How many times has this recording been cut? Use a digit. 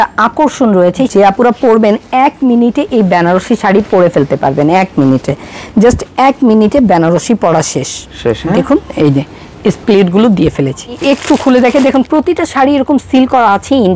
2